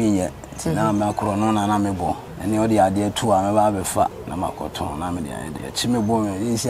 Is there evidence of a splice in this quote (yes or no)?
yes